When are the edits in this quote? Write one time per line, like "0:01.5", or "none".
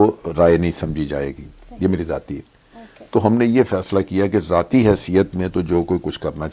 none